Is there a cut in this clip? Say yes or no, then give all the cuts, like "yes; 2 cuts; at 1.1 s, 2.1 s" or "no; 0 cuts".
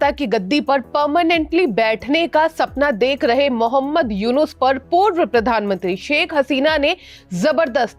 no; 0 cuts